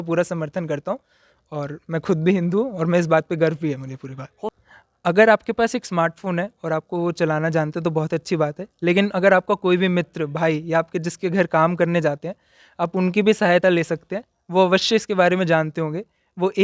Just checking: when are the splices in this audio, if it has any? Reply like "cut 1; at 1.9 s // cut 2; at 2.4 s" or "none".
cut 1; at 4.4 s